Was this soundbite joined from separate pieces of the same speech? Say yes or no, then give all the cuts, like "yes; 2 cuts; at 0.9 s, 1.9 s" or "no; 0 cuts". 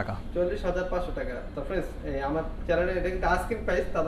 no; 0 cuts